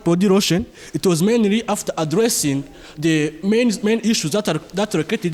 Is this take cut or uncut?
uncut